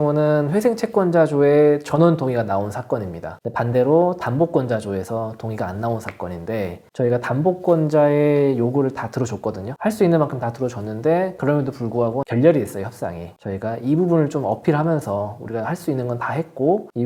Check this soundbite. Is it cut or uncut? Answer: uncut